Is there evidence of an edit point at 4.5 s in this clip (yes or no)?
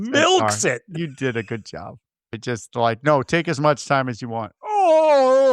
no